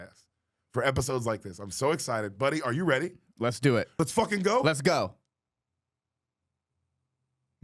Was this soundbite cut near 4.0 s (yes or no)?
yes